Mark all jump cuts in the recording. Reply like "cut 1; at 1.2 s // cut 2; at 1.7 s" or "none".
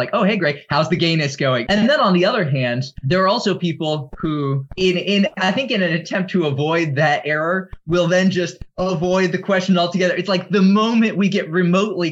cut 1; at 1.6 s // cut 2; at 2.9 s // cut 3; at 4.7 s